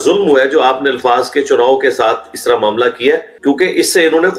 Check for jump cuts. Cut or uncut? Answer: uncut